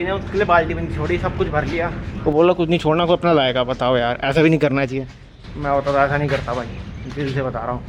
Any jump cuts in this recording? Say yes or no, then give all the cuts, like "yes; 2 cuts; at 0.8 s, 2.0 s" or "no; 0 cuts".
no; 0 cuts